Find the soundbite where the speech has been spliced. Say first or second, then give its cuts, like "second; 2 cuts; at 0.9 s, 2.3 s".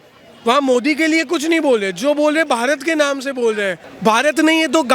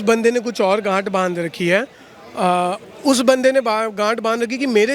first; 1 cut; at 3.9 s